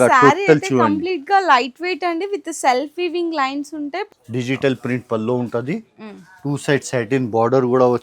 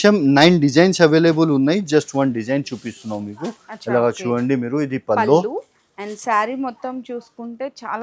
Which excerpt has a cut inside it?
first; 1 cut; at 4.1 s

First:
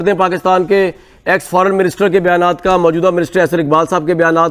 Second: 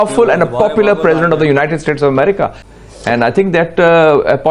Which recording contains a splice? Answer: second; 1 cut; at 2.6 s

